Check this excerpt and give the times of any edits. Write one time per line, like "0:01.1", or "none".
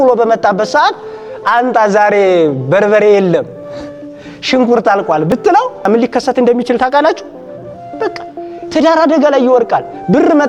0:05.9